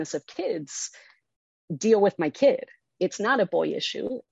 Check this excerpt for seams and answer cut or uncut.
cut